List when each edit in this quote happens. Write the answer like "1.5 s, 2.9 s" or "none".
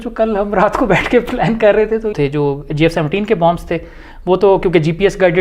2.2 s